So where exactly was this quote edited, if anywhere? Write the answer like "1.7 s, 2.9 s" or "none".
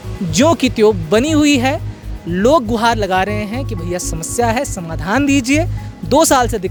none